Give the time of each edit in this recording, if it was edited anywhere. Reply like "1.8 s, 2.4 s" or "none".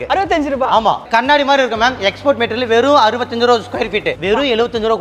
1.1 s, 4.2 s